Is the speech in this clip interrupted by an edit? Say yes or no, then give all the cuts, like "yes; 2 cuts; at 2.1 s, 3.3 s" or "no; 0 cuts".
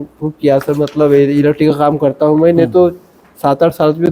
no; 0 cuts